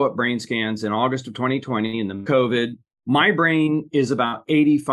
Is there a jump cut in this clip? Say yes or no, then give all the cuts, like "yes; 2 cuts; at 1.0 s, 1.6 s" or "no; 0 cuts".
no; 0 cuts